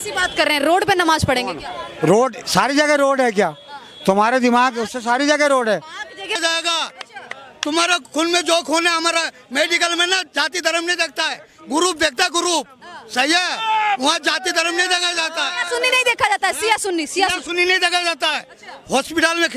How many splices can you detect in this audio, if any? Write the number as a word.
one